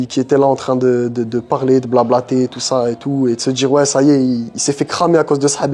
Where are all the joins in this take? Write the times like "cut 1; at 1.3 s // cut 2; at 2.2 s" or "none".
none